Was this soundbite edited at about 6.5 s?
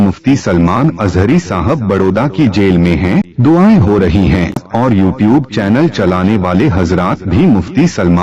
no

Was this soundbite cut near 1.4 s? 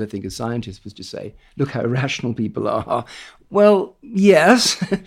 no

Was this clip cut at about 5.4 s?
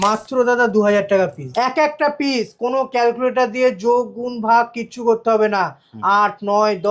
no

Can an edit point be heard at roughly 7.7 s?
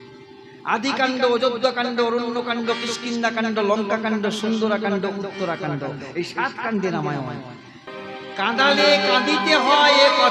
yes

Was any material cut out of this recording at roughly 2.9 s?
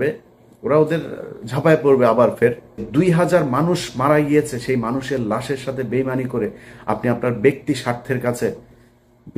yes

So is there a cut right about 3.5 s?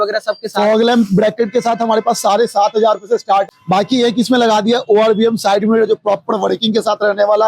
yes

